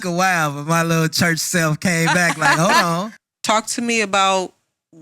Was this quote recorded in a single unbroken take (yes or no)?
no